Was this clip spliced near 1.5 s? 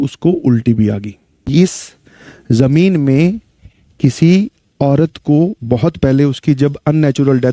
yes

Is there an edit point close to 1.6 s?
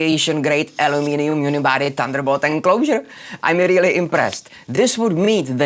no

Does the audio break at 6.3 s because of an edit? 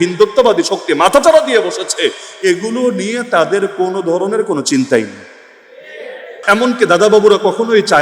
yes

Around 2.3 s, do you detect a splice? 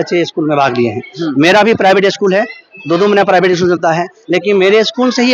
no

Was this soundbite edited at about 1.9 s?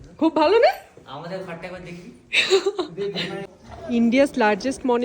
no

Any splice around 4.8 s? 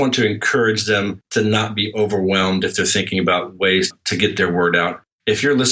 no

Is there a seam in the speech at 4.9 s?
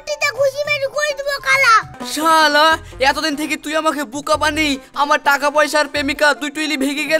no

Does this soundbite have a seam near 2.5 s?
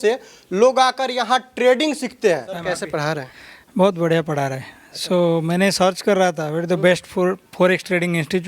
yes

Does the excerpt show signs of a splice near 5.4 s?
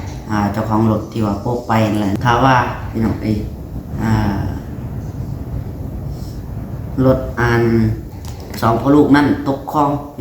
no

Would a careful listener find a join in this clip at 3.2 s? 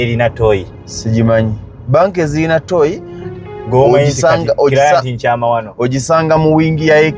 no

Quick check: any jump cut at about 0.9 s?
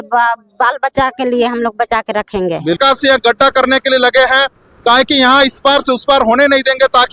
no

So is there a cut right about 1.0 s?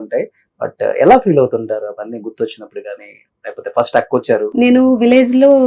no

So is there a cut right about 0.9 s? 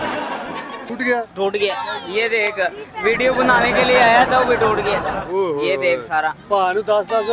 yes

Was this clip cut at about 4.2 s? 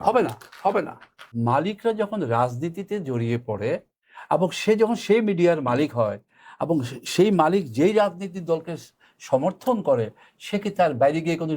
no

